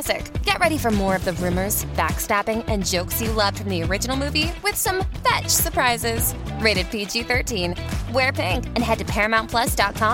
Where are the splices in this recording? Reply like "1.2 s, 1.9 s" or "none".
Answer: none